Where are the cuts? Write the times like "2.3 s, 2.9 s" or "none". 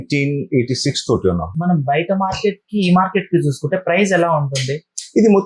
1.6 s